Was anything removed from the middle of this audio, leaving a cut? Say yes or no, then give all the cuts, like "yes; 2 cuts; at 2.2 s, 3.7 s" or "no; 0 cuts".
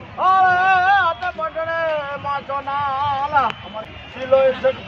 yes; 1 cut; at 3.8 s